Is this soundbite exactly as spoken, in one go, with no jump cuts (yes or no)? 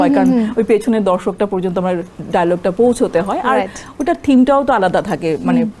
yes